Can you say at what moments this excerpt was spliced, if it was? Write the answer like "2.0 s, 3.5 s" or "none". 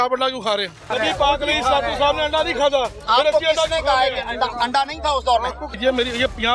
0.9 s, 5.7 s